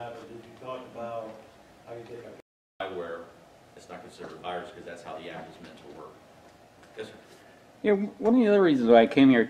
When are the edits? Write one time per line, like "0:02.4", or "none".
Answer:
0:02.8